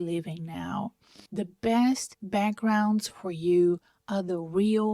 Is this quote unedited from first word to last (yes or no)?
yes